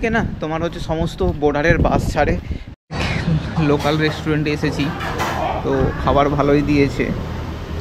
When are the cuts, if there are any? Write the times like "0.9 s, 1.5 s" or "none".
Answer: 2.7 s